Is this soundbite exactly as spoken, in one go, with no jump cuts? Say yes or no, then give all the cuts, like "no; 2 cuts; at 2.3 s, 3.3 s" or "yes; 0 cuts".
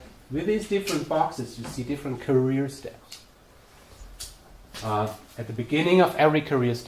no; 1 cut; at 1.3 s